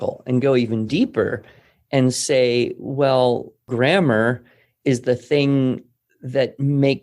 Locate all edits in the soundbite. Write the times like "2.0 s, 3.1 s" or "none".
3.6 s

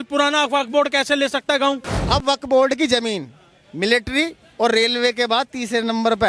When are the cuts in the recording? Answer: 2.0 s

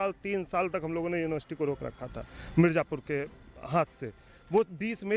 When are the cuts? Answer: none

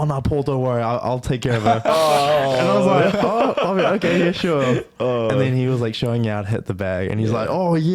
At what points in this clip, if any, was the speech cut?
none

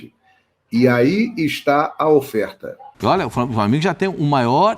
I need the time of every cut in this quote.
2.9 s

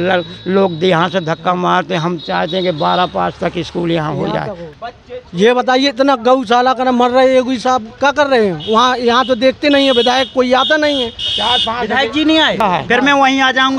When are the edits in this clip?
4.6 s, 12.6 s

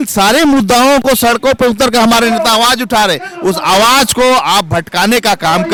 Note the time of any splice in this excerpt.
none

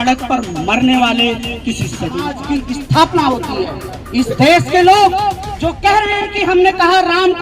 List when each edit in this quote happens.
2.3 s

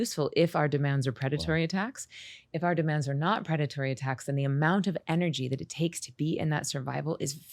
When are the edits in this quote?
none

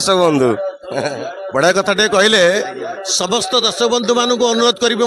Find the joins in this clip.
none

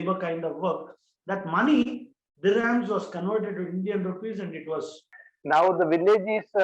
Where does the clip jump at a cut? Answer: 5.0 s

